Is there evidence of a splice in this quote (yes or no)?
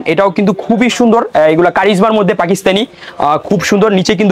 no